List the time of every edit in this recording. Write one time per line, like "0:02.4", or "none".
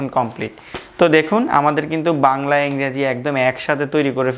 none